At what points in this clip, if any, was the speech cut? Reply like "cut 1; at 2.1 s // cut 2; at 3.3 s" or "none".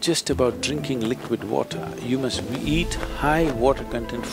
none